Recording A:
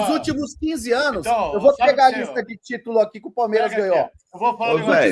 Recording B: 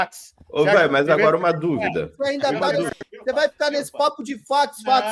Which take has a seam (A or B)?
B